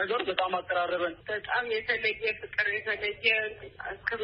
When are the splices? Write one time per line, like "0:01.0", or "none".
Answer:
0:01.2